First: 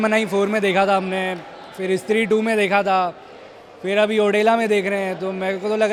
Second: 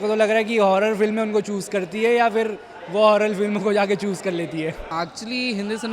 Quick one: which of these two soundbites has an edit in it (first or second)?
second